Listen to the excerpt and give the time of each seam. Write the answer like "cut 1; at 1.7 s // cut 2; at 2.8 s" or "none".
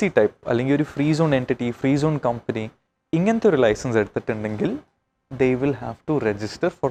none